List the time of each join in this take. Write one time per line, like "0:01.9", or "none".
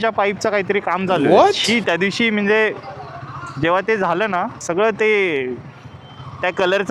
none